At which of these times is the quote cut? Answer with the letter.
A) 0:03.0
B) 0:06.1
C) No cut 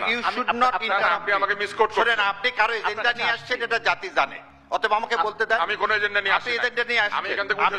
C